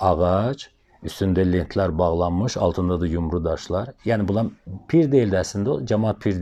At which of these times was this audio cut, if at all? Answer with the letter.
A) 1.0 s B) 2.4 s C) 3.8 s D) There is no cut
D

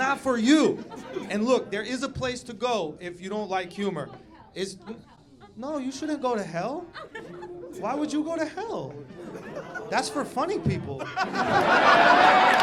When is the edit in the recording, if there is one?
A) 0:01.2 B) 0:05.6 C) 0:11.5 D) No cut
A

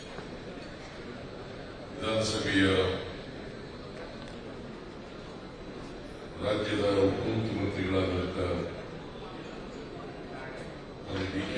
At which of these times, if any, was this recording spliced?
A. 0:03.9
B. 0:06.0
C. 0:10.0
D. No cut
D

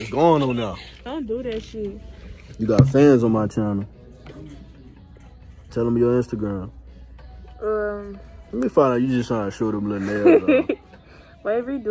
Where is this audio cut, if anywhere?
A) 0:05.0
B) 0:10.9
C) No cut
B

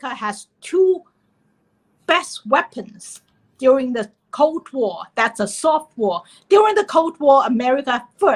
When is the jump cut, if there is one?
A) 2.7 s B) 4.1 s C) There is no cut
C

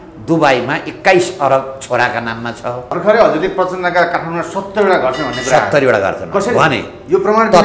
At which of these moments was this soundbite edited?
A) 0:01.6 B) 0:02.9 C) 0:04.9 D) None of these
B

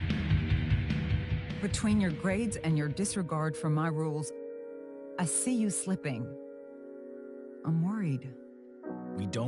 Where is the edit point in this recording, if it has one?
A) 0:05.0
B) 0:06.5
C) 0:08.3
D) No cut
D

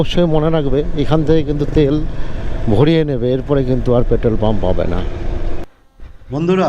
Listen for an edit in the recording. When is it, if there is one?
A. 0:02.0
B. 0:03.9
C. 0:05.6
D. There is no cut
C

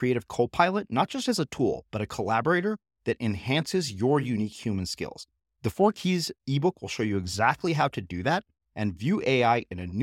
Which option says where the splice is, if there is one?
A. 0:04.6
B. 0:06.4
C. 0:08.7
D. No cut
D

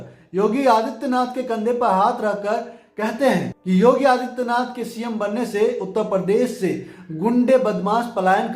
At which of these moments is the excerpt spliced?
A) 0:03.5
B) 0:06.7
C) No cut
A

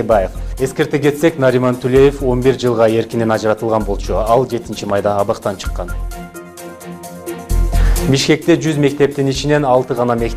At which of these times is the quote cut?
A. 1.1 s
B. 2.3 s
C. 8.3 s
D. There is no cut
D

